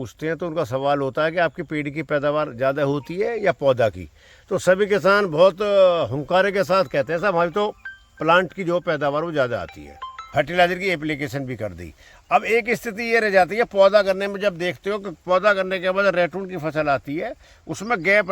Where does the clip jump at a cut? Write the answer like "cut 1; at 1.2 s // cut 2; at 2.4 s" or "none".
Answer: cut 1; at 10.2 s